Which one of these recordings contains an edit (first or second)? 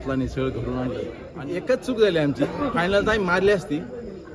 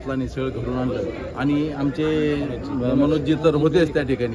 first